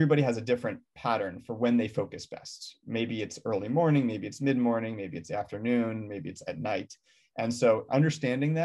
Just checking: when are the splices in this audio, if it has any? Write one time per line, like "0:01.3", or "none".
none